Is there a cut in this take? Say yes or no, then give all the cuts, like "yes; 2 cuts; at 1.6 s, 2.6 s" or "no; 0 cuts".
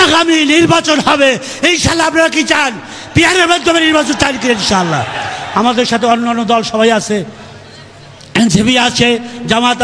no; 0 cuts